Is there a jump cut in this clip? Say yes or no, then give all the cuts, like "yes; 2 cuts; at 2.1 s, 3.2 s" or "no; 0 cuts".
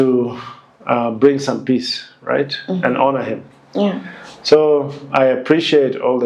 no; 0 cuts